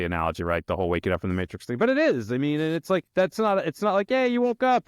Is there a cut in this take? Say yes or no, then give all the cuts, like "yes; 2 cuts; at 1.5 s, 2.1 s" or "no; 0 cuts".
yes; 1 cut; at 3.1 s